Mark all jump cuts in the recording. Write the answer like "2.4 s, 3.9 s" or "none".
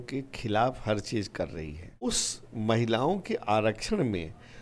2.1 s